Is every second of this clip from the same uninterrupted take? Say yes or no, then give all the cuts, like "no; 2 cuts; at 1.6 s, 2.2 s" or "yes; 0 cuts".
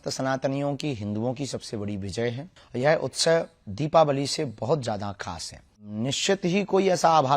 no; 2 cuts; at 2.5 s, 5.9 s